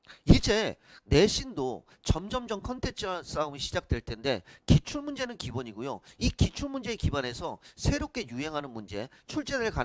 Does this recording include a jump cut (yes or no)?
no